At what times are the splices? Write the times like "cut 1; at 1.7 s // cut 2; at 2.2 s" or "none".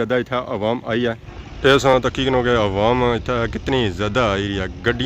cut 1; at 1.3 s